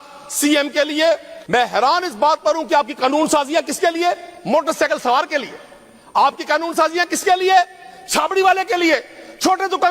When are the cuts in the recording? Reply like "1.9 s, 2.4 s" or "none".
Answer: 1.3 s